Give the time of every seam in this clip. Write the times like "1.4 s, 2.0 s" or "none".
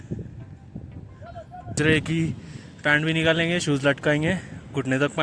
1.8 s